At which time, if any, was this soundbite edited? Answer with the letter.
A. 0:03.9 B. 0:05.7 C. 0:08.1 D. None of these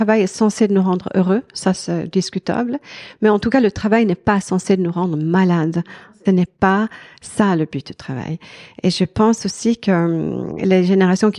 B